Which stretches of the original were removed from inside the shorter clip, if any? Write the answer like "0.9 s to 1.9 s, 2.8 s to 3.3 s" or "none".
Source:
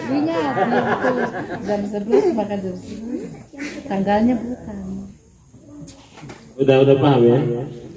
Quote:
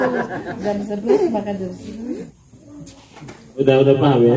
3.4 s to 5.4 s